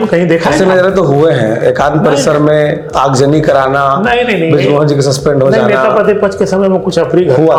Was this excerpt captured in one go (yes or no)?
yes